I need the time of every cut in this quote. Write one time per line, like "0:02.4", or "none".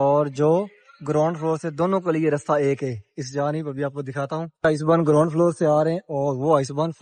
none